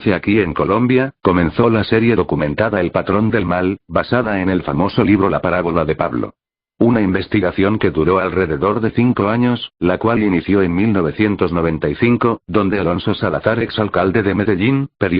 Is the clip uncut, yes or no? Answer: yes